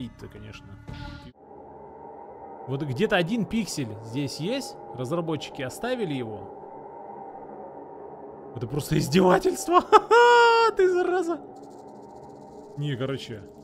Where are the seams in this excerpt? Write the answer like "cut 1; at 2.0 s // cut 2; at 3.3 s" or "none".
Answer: cut 1; at 1.2 s